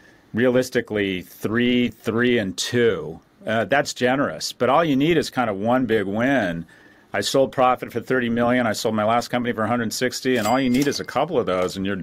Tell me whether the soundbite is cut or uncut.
uncut